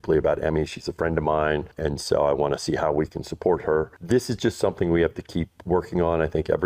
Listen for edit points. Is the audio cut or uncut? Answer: uncut